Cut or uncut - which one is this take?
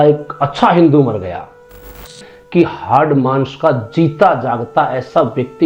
cut